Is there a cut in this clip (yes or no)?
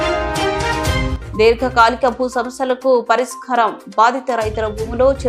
yes